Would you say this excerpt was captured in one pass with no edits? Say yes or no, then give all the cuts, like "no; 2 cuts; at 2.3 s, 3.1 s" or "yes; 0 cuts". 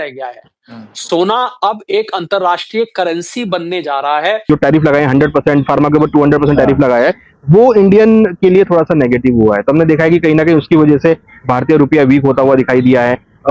no; 1 cut; at 4.4 s